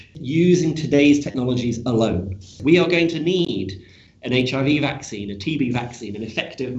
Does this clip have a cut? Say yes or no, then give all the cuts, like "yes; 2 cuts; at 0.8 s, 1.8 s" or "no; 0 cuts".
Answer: yes; 1 cut; at 2.5 s